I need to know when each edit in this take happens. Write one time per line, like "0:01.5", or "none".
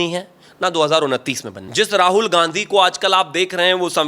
0:01.5

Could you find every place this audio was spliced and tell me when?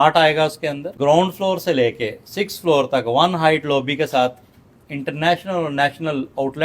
0:00.9

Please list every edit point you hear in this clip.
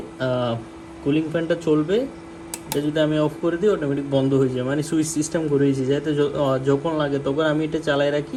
none

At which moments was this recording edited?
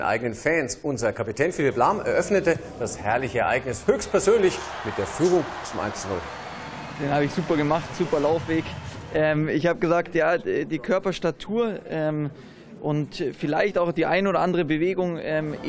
0:02.1

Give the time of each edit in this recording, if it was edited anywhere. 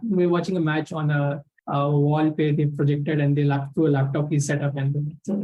0:01.5

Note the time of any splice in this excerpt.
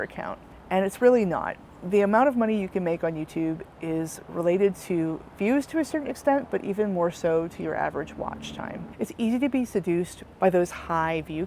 0:08.9

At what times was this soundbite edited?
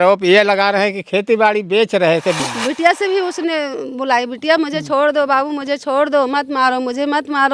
0:02.4

